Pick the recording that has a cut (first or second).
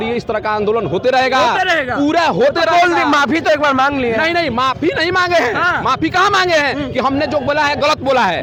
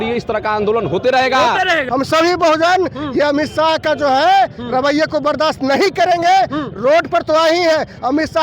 second